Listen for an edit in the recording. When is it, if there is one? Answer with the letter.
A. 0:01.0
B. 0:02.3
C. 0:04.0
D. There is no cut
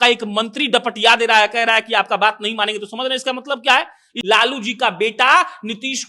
C